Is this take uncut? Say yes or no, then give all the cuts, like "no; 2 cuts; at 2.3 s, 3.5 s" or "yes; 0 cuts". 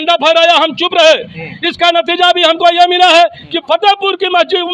yes; 0 cuts